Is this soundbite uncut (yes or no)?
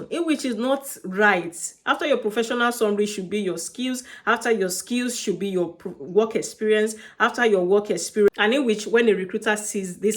no